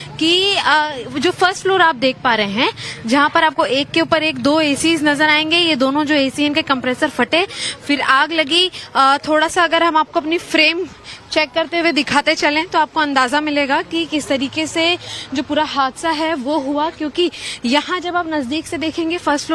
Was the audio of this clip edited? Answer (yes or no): no